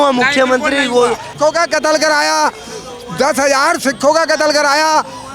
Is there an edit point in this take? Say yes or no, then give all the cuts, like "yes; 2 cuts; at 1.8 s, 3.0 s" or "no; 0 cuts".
yes; 1 cut; at 1.3 s